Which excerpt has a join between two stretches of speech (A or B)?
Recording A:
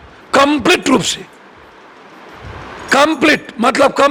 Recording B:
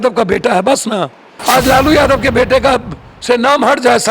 B